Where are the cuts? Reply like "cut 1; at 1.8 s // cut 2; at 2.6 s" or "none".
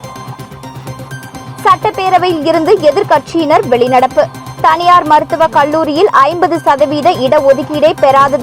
cut 1; at 0.9 s